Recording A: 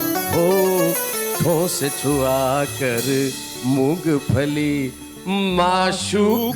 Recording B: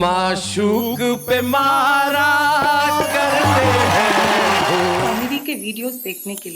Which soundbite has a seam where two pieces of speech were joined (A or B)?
B